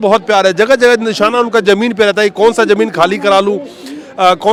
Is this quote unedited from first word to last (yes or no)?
yes